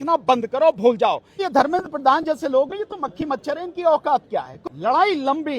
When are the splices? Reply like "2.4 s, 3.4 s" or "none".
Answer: 1.4 s, 4.6 s